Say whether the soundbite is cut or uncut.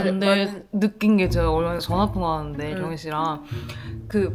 uncut